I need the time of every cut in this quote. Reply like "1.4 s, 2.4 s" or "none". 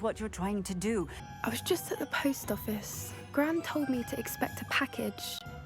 1.2 s